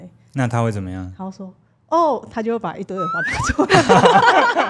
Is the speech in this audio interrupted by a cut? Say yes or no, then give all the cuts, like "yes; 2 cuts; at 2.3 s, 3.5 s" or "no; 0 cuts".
no; 0 cuts